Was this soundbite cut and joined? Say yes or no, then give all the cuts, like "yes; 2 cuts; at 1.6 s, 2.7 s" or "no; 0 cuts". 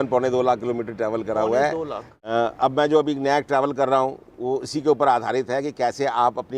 yes; 1 cut; at 2.1 s